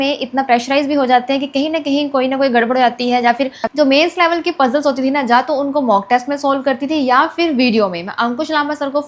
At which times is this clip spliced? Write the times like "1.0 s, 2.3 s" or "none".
3.6 s